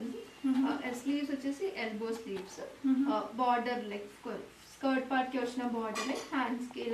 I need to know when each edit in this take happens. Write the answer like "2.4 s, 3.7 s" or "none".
none